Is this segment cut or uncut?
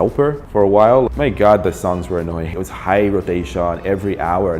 cut